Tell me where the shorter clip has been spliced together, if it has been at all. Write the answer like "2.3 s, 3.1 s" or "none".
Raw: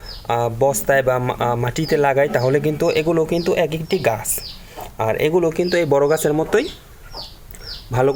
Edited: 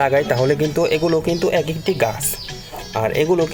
none